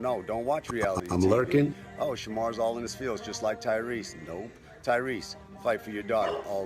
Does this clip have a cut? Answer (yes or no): yes